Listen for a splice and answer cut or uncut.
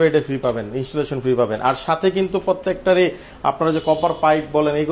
uncut